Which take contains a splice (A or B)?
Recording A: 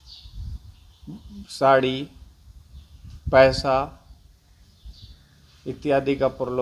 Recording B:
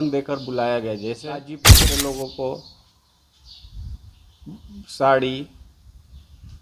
B